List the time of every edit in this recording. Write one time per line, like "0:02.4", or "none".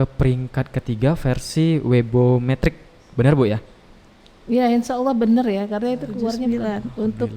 0:06.4